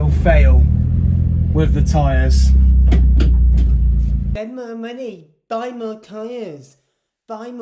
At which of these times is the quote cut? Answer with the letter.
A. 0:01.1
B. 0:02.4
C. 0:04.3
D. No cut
C